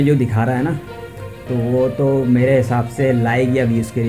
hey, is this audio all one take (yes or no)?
yes